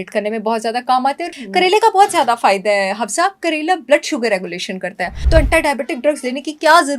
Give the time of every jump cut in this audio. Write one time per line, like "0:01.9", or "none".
0:01.5
0:05.1